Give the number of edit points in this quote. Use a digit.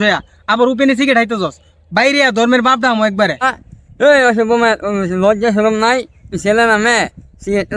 1